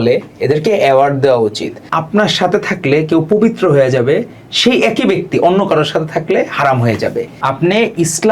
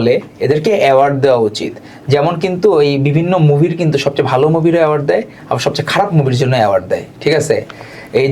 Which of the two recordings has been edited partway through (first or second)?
first